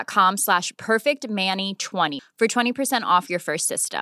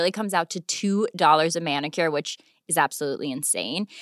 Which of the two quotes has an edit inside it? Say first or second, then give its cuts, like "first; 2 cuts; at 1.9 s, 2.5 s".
first; 1 cut; at 2.2 s